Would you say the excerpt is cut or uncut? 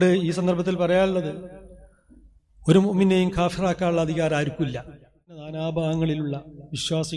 cut